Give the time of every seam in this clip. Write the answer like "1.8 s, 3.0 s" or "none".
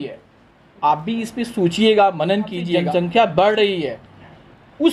2.8 s